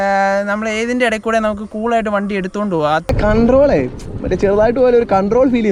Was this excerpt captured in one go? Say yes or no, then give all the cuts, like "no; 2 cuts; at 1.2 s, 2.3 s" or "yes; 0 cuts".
no; 1 cut; at 3.1 s